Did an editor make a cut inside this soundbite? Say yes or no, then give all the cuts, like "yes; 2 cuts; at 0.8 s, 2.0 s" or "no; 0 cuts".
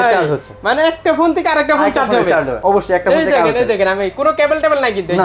yes; 1 cut; at 2.5 s